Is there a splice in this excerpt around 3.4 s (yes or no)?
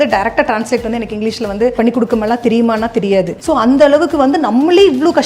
yes